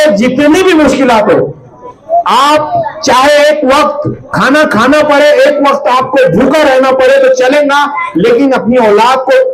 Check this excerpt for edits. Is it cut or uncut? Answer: uncut